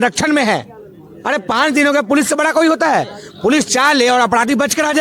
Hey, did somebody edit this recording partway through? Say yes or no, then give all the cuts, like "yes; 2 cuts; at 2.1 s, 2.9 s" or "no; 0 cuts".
no; 0 cuts